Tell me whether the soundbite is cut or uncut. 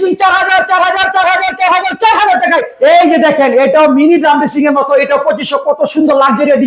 cut